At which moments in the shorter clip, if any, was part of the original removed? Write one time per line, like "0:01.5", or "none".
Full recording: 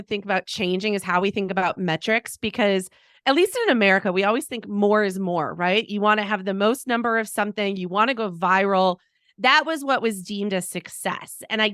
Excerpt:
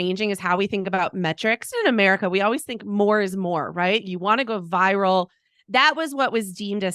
0:01.7
0:04.1